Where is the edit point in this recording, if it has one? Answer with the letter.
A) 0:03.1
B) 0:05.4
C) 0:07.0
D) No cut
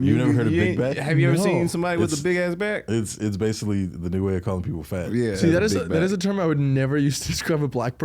B